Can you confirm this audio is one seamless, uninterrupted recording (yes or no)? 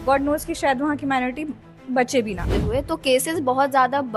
no